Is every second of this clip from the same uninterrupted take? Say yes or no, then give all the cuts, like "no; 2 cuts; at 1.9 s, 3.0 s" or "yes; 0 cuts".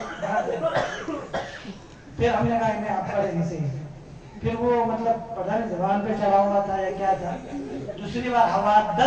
yes; 0 cuts